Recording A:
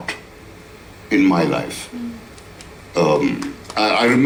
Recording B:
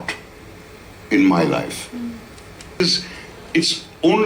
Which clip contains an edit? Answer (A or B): B